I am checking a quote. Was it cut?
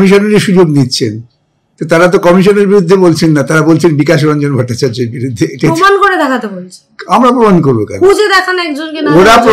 no; 0 cuts

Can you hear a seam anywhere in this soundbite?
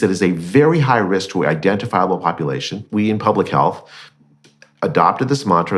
yes; 1 cut; at 2.8 s

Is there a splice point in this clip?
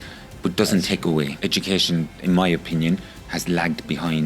yes; 1 cut; at 1.4 s

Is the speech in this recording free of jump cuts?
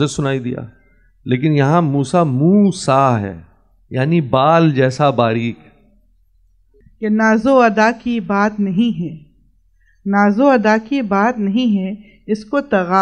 no; 1 cut; at 7.0 s

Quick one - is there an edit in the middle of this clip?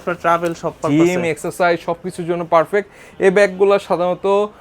no; 0 cuts

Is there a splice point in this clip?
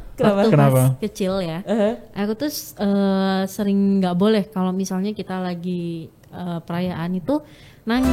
no; 0 cuts

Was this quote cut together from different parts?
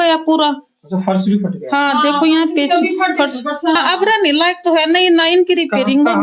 yes; 1 cut; at 3.8 s

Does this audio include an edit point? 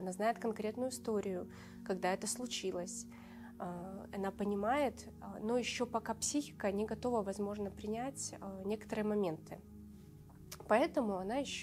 no; 0 cuts

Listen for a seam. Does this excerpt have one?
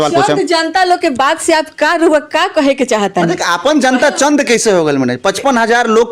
no; 0 cuts

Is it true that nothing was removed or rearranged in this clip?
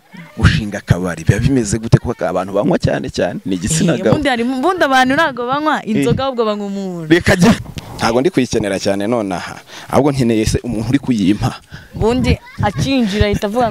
no; 1 cut; at 7.6 s

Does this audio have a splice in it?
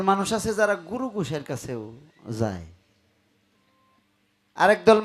no; 0 cuts

